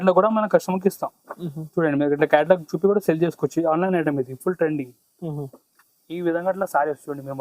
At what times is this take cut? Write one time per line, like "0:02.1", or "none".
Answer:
0:05.6